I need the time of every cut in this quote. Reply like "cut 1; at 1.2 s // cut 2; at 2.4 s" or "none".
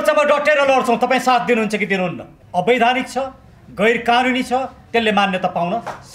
cut 1; at 2.3 s